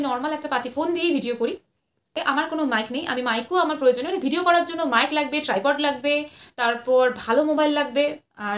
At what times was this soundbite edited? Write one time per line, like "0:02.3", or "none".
0:02.2